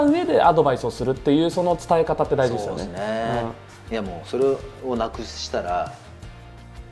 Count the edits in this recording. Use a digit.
1